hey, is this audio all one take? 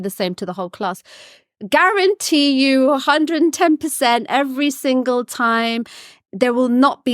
no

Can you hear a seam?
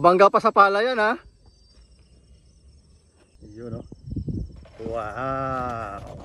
yes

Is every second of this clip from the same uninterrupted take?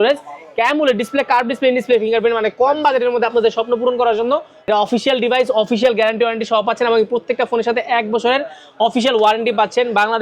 no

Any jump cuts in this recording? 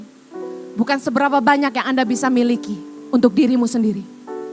no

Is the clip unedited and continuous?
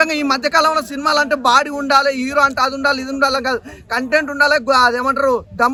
yes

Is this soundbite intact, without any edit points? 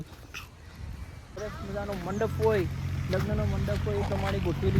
no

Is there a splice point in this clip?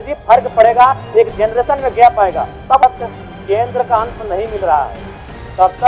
yes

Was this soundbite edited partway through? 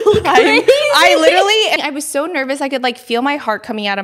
yes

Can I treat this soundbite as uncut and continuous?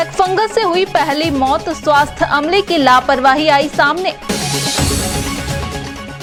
yes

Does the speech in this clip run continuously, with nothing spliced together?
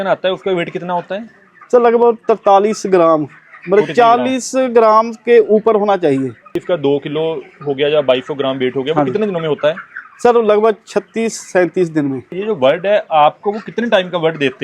no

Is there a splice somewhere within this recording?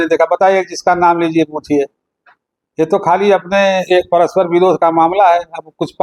no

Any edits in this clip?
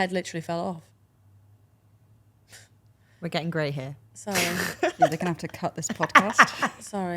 yes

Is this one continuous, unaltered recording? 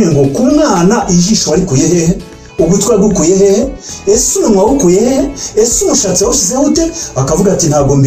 yes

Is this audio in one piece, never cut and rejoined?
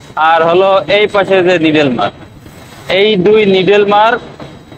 yes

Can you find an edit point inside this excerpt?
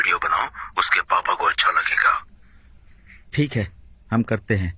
no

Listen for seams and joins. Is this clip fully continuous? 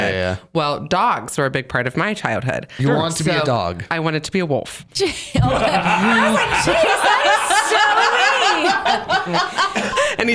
yes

